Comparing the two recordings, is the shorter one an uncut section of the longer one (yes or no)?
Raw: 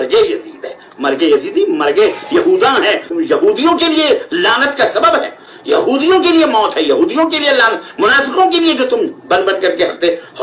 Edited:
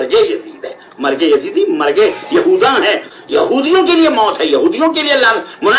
no